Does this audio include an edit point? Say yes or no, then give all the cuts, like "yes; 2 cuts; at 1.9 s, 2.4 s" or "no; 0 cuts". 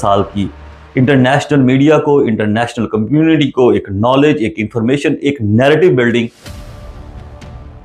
no; 0 cuts